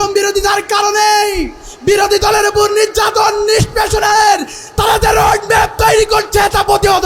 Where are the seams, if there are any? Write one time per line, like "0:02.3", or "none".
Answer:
none